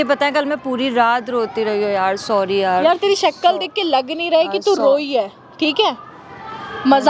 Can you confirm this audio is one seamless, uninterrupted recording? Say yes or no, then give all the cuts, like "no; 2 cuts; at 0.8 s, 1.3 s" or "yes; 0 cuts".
yes; 0 cuts